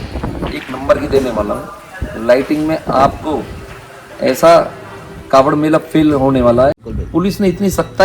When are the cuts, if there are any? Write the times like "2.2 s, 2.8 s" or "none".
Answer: 6.8 s